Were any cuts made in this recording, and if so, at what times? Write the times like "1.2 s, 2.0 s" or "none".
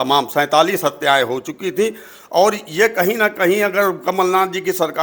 none

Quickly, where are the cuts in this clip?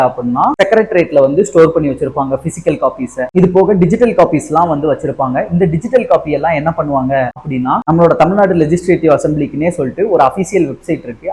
none

